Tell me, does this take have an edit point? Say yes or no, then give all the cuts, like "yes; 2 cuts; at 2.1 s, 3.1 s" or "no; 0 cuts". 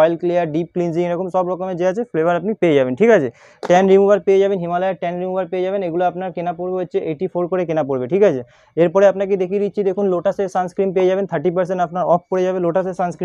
no; 0 cuts